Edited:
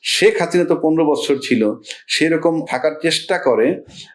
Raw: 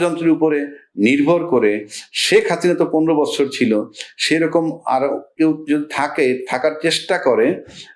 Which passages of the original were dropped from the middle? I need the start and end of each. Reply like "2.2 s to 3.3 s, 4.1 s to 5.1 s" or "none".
4.8 s to 6.5 s